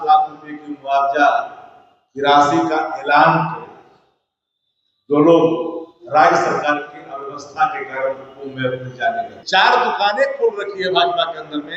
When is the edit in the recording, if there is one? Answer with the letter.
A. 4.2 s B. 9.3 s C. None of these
B